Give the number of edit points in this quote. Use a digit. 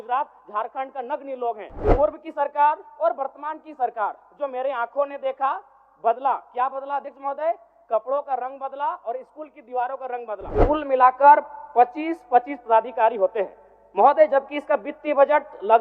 2